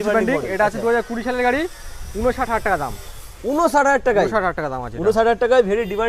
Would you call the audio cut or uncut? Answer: uncut